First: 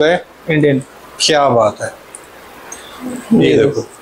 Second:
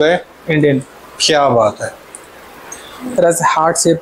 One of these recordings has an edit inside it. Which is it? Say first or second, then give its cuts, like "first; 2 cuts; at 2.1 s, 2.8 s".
second; 1 cut; at 3.1 s